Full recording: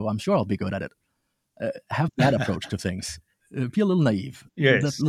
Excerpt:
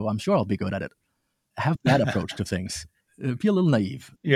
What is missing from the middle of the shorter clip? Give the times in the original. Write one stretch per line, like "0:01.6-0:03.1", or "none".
0:01.5-0:01.8